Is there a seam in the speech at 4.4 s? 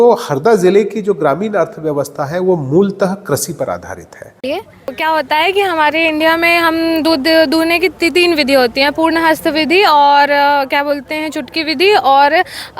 yes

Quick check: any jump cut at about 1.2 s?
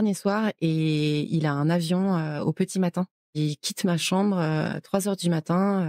no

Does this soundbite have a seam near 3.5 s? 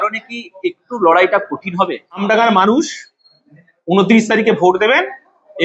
no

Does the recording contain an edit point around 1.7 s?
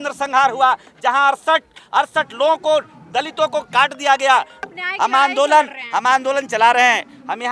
no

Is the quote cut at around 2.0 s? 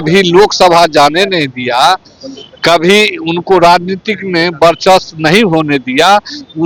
no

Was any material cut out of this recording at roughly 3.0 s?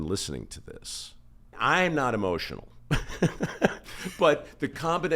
no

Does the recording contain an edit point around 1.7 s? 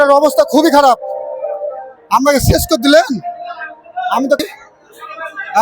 no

